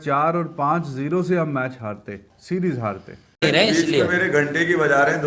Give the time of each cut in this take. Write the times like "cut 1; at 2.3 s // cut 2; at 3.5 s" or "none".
cut 1; at 3.4 s